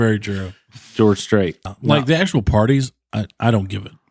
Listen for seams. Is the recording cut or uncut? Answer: cut